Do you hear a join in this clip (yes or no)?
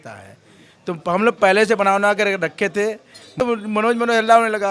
yes